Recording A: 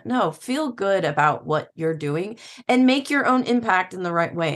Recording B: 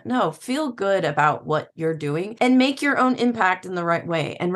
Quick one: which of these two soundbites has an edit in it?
B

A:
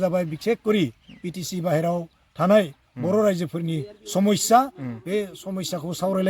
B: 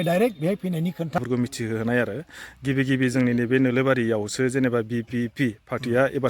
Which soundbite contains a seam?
B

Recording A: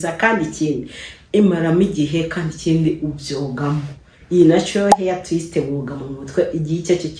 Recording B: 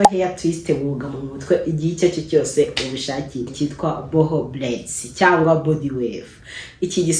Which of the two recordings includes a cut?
B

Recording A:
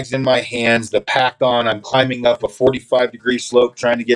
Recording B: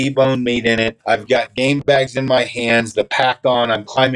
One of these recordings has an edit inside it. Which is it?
B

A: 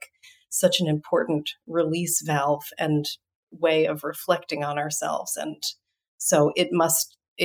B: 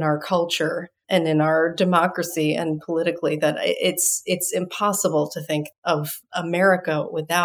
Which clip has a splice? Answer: B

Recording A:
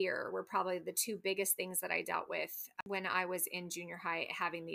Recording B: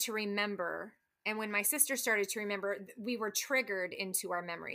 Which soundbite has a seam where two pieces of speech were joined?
A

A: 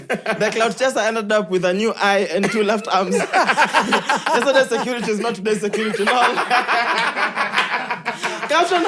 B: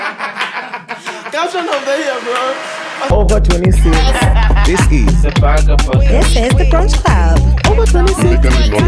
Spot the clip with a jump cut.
B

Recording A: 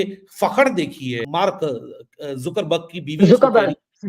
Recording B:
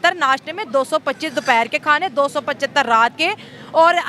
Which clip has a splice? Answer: A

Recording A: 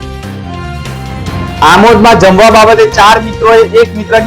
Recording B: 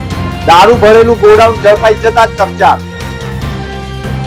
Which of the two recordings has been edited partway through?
A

